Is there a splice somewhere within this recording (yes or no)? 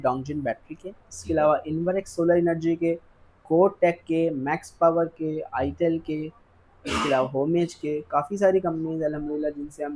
no